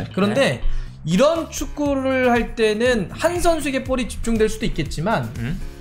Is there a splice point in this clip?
no; 0 cuts

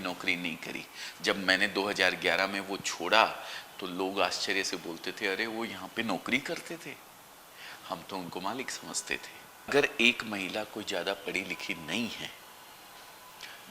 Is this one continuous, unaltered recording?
no; 1 cut; at 9.7 s

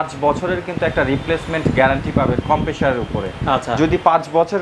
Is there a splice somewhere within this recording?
no; 0 cuts

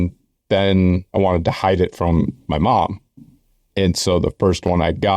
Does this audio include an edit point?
yes; 1 cut; at 1.0 s

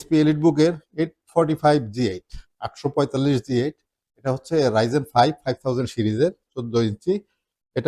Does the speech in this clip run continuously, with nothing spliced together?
yes; 0 cuts

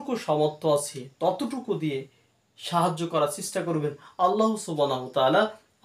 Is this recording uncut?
yes; 0 cuts

